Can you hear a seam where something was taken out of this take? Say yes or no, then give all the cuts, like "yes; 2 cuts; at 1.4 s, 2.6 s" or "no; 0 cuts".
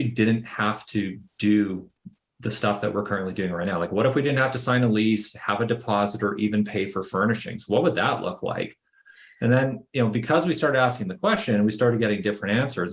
no; 0 cuts